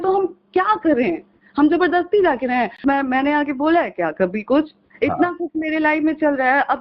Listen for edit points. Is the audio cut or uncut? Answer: cut